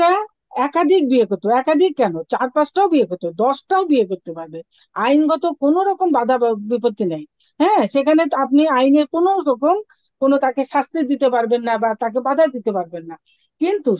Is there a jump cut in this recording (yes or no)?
no